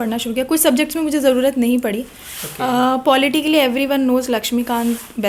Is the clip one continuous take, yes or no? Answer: yes